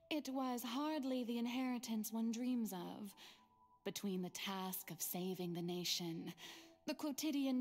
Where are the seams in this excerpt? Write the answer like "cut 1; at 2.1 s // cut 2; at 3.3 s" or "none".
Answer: none